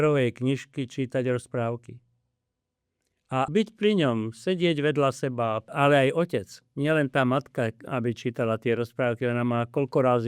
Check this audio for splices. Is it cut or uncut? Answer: cut